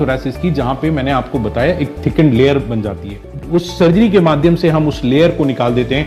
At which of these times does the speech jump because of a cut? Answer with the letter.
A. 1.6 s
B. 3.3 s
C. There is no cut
B